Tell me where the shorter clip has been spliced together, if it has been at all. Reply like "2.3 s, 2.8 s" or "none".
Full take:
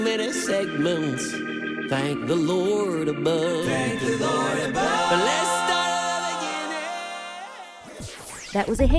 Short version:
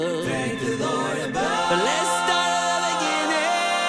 none